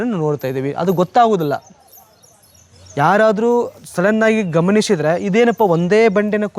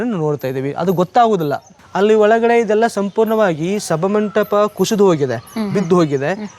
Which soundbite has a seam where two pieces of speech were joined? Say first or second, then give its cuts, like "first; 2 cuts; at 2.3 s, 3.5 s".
second; 1 cut; at 1.8 s